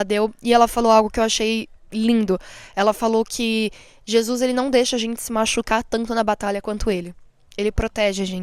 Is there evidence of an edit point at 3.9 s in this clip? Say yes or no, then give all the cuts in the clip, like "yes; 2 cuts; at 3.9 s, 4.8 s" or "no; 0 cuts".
no; 0 cuts